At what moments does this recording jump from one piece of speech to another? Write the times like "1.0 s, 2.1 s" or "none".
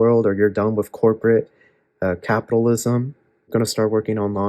3.5 s